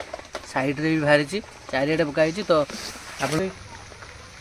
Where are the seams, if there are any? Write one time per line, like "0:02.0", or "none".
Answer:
0:03.4

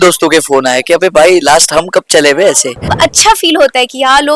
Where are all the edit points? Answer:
0:02.9

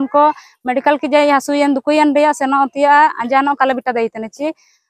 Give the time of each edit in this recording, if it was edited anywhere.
none

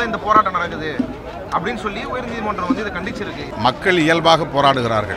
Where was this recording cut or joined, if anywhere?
0:03.5

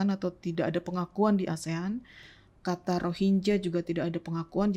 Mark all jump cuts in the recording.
none

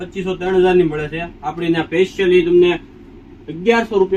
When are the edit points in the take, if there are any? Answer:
none

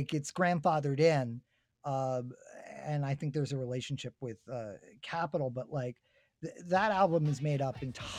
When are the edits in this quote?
none

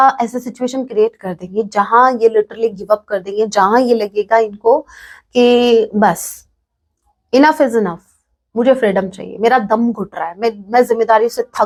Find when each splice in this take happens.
none

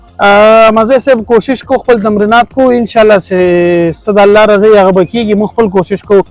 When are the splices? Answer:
none

